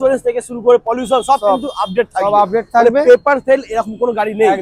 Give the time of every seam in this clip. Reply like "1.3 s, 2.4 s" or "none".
none